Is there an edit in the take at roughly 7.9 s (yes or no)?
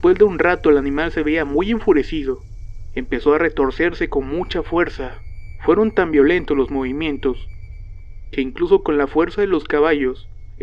no